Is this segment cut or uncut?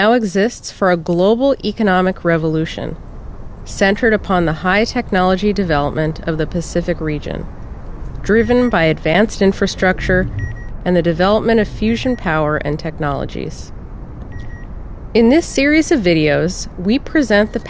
cut